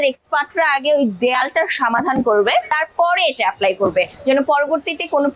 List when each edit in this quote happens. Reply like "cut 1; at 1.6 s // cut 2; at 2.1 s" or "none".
none